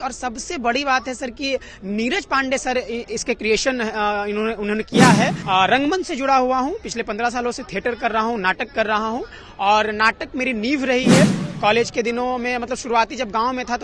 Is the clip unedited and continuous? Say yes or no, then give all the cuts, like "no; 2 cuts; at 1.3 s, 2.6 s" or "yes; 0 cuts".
no; 1 cut; at 5.4 s